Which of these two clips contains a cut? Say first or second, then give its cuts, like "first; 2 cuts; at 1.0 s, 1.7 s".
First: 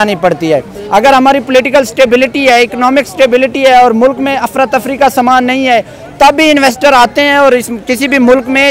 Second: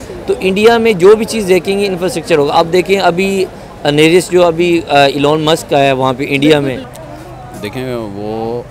second; 1 cut; at 6.9 s